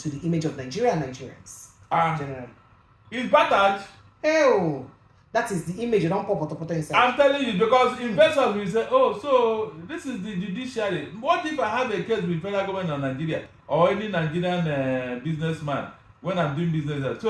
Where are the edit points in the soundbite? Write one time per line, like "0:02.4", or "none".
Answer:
none